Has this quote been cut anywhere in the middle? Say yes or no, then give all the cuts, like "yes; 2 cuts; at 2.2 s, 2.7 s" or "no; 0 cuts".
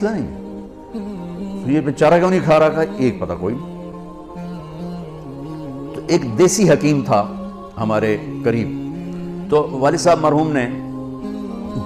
no; 0 cuts